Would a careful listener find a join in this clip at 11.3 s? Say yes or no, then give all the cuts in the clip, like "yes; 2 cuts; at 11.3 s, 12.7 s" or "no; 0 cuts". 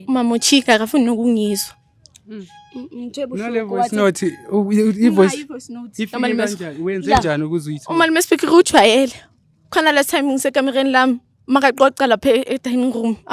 no; 0 cuts